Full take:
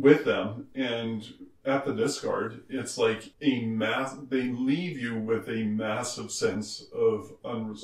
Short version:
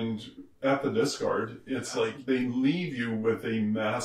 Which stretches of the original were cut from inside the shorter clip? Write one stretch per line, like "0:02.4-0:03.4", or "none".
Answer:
0:03.2-0:04.2